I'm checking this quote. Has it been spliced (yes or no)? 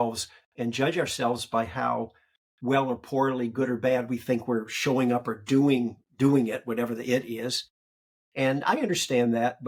no